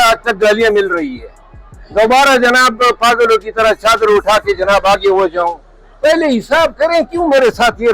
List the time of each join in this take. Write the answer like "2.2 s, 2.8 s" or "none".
none